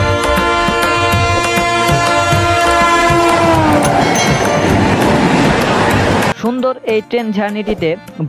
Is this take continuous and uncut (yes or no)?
no